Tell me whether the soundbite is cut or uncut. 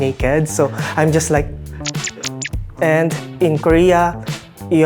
cut